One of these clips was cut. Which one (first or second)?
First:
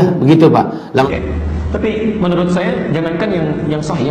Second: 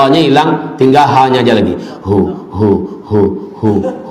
first